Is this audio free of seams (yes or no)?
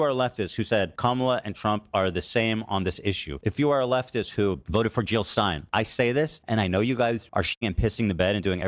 no